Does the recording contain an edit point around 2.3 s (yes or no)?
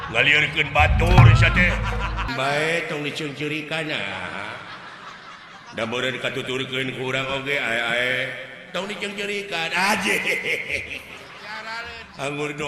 yes